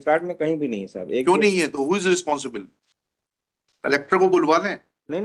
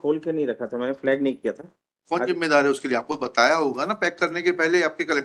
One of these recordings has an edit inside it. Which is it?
first; 1 cut; at 2.8 s

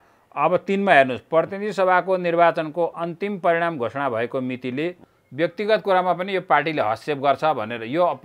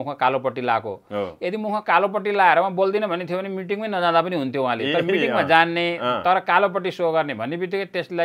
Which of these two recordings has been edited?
first; 1 cut; at 5.1 s

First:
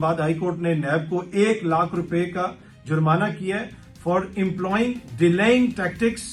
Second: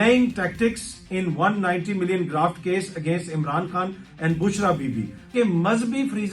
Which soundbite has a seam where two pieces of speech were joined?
second; 1 cut; at 5.3 s

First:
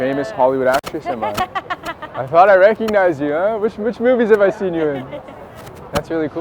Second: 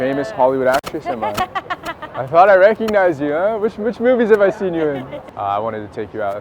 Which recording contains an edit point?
second; 1 cut; at 5.2 s

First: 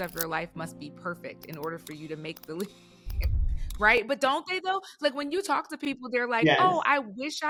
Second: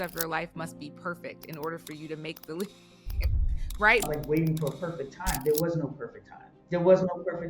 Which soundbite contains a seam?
second; 1 cut; at 4.0 s

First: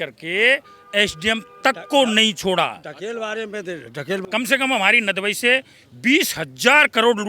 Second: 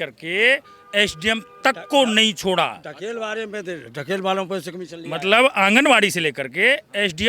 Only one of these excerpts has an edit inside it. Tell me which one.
first; 1 cut; at 4.2 s

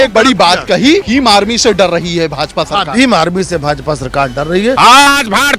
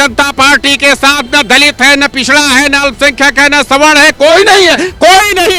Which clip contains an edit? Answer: first; 2 cuts; at 1.1 s, 4.8 s

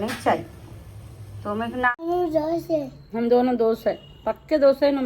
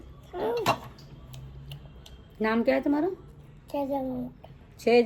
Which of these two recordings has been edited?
first; 1 cut; at 1.9 s

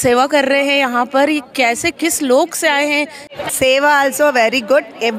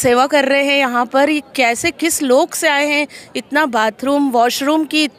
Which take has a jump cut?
first; 1 cut; at 3.4 s

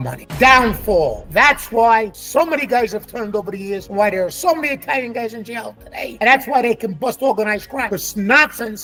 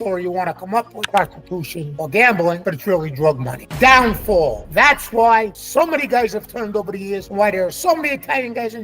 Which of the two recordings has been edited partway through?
second; 1 cut; at 1.1 s

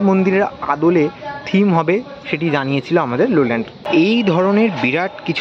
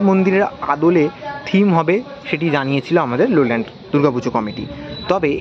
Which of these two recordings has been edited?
first; 1 cut; at 3.8 s

